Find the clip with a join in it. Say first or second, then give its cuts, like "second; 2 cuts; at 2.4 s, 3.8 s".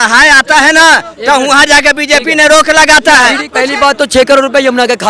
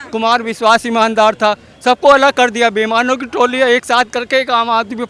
first; 1 cut; at 3.5 s